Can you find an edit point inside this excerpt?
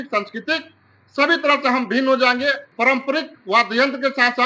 yes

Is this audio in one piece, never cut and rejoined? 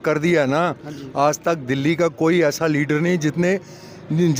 yes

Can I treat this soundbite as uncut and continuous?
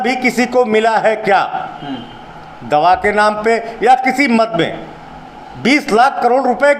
yes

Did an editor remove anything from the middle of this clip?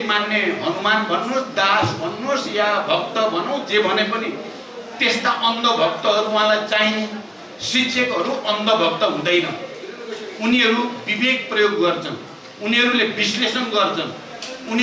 no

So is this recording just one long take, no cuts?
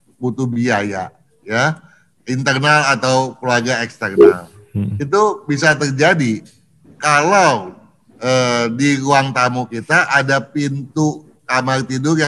yes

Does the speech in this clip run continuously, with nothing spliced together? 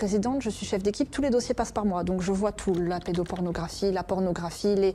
yes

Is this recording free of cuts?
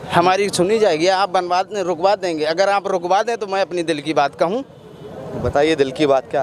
yes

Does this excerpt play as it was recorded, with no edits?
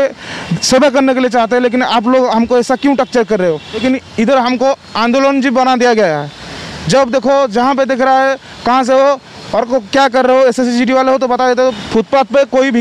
no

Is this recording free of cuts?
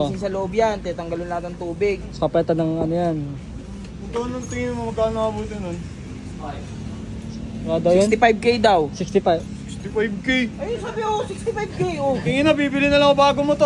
yes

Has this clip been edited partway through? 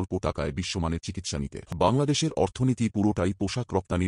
yes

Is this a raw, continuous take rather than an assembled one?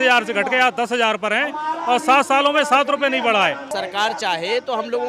no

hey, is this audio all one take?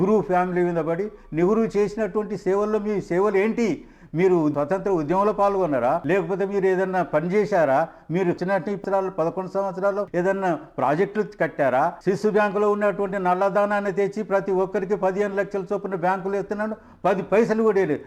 no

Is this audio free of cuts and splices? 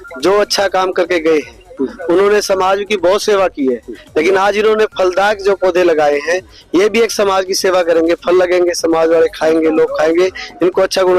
yes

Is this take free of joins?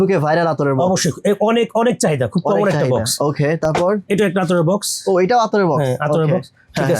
yes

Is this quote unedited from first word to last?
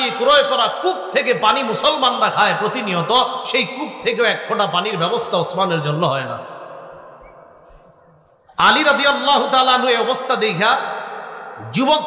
yes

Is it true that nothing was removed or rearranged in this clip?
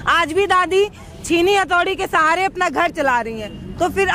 yes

